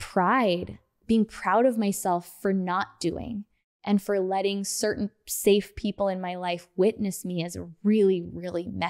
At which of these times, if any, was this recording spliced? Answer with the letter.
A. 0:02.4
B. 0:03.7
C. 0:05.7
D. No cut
B